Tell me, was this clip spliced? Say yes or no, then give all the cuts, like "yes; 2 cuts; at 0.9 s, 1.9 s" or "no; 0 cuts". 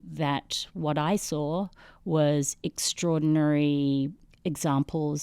yes; 1 cut; at 4.3 s